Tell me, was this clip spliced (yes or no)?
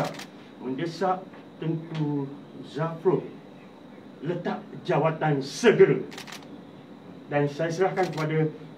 no